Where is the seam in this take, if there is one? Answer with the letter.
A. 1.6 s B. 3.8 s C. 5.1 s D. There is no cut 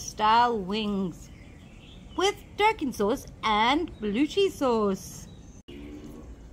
D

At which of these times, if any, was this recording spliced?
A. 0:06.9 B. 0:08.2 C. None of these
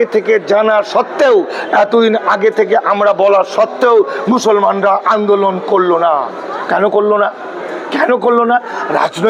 C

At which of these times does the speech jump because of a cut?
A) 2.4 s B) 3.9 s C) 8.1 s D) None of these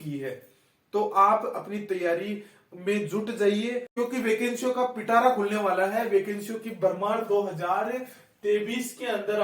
B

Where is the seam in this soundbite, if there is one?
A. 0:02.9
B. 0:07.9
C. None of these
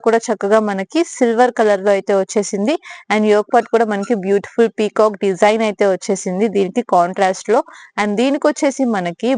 C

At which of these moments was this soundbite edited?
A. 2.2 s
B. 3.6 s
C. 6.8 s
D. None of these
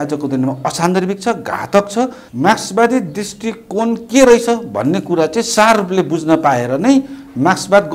A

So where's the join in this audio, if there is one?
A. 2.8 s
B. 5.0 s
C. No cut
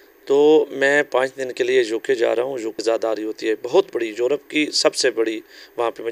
A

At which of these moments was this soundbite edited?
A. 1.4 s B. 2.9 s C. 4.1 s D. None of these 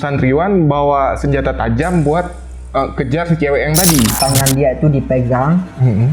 C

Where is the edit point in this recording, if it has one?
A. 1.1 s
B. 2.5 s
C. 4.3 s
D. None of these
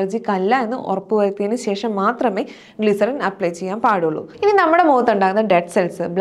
C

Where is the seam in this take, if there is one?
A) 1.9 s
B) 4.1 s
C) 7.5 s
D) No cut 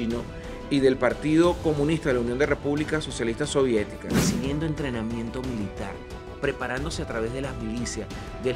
B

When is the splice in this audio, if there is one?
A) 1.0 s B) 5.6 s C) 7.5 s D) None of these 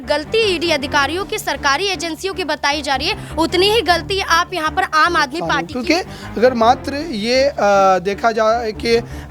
B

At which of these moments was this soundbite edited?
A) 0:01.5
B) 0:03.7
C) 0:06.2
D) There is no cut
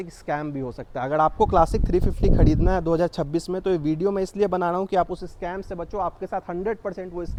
D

